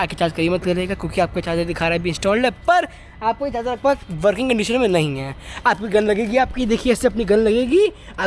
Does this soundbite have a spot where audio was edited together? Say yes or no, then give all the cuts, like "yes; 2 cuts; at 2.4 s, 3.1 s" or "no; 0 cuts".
no; 0 cuts